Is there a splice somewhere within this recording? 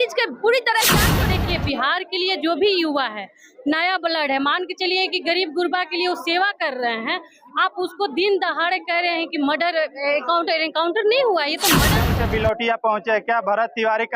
yes; 2 cuts; at 1.2 s, 12.0 s

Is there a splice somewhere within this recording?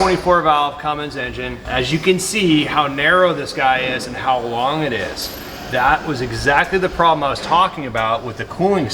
yes; 1 cut; at 1.6 s

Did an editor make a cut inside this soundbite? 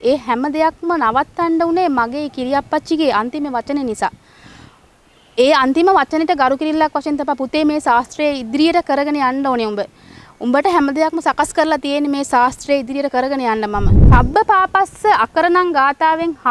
yes; 1 cut; at 13.9 s

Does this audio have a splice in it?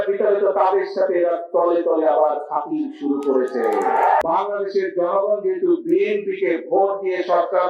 yes; 1 cut; at 4.2 s

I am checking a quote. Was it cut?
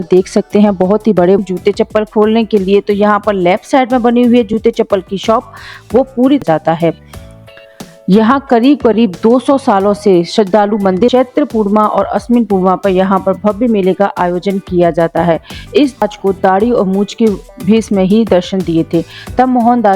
yes; 4 cuts; at 1.4 s, 6.4 s, 11.1 s, 16.0 s

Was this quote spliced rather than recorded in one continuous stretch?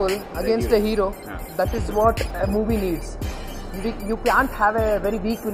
no; 0 cuts

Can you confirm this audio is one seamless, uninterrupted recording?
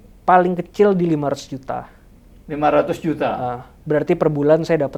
yes; 0 cuts

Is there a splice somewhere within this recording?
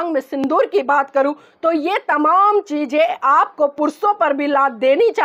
no; 0 cuts

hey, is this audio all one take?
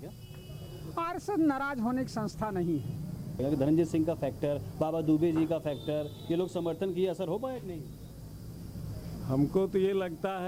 no; 1 cut; at 3.3 s

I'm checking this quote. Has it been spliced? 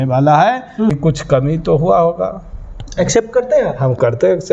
yes; 1 cut; at 0.9 s

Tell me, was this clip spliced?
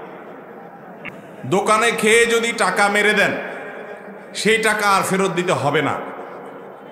yes; 1 cut; at 1.1 s

